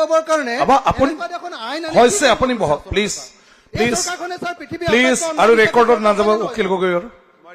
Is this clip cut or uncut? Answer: uncut